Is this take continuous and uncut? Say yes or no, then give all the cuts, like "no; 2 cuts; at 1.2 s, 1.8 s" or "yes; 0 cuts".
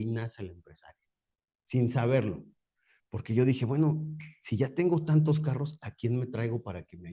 yes; 0 cuts